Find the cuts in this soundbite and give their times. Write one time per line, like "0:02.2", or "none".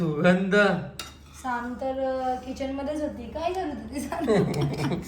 none